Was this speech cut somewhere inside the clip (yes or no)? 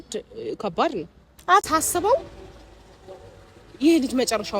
yes